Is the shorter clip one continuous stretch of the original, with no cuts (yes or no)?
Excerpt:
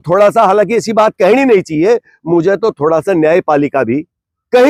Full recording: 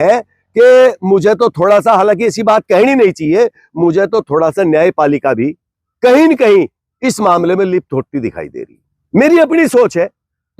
yes